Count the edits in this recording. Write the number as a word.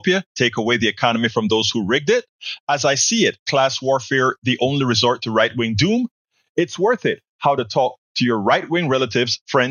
zero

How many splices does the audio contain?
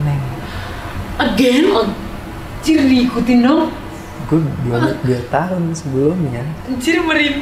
zero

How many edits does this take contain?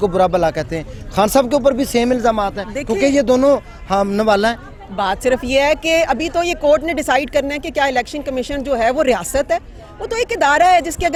zero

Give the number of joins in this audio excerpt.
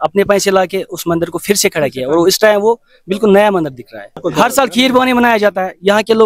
one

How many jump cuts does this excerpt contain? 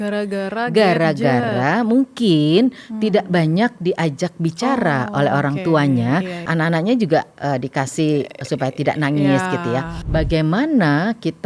two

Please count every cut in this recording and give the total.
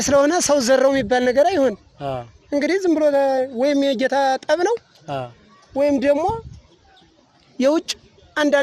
zero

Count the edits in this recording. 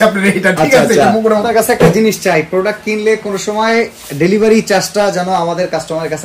one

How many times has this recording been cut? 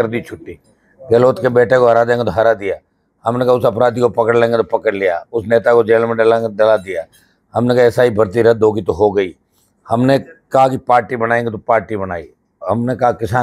zero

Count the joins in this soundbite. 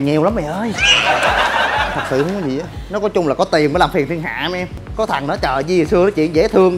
one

